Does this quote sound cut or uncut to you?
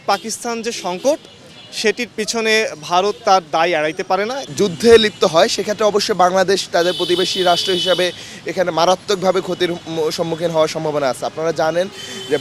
uncut